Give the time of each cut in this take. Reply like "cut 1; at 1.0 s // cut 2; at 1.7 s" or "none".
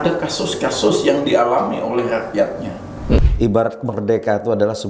cut 1; at 3.2 s